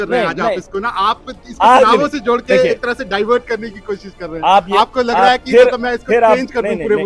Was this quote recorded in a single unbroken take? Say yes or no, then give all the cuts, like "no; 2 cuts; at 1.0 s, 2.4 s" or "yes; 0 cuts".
yes; 0 cuts